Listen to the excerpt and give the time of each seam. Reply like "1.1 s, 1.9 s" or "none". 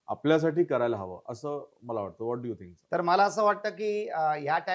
none

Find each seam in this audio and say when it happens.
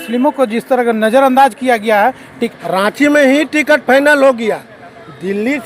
2.3 s

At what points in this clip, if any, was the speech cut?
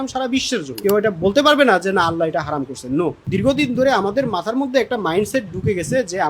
0.8 s, 3.2 s

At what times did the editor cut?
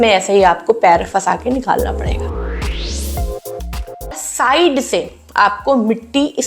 4.2 s

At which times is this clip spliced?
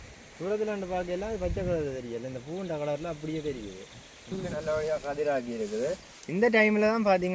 4.3 s

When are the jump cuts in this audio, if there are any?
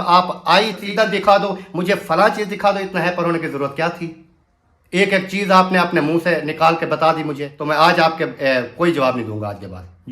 0.8 s, 7.5 s

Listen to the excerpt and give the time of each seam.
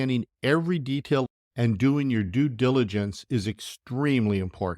1.2 s

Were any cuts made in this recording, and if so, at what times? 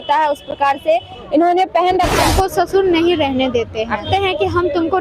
2.2 s, 4.1 s

